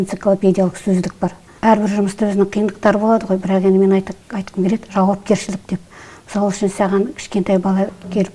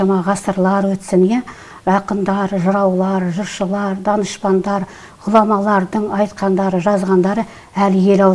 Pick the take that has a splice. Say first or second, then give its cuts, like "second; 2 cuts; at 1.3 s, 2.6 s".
first; 1 cut; at 1.5 s